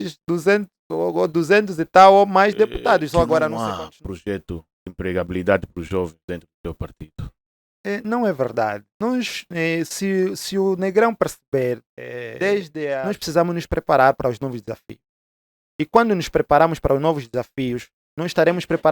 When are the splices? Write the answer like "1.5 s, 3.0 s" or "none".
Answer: 3.5 s, 12.9 s